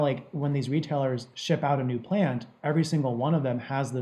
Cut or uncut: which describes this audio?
uncut